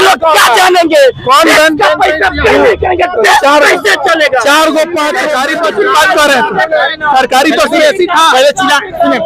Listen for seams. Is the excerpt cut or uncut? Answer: cut